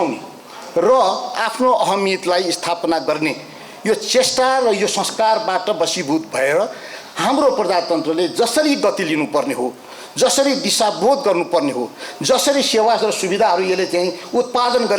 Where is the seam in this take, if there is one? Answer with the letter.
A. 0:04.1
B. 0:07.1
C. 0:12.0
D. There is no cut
D